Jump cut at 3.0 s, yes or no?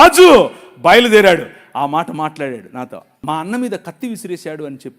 yes